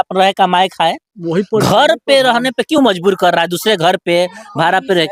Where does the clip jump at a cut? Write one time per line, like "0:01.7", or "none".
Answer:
none